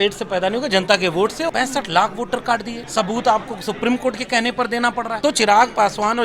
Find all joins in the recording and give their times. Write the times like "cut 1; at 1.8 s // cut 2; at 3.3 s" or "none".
cut 1; at 1.5 s // cut 2; at 2.8 s // cut 3; at 5.2 s